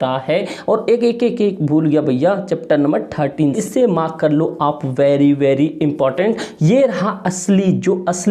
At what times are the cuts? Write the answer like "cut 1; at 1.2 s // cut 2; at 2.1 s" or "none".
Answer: cut 1; at 3.6 s